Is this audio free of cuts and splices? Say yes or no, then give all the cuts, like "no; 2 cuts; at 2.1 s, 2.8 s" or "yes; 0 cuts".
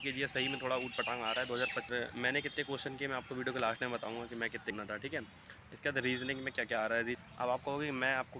no; 3 cuts; at 1.9 s, 4.7 s, 7.2 s